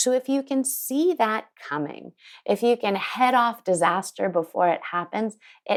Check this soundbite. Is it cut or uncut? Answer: uncut